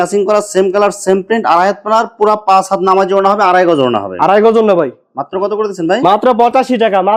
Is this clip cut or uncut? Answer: uncut